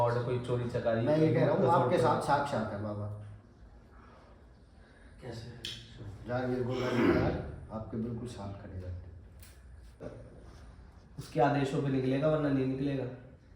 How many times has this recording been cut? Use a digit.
1